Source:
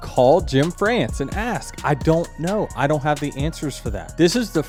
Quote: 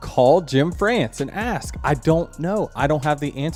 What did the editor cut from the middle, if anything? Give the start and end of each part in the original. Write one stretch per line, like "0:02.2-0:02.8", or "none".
none